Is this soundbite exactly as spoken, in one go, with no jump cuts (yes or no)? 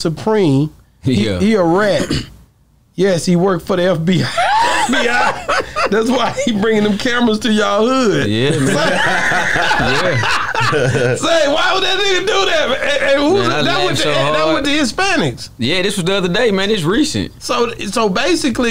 yes